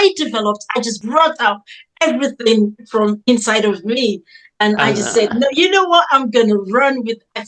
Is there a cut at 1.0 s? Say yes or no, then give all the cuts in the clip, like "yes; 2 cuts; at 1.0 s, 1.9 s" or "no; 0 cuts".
yes; 1 cut; at 1.0 s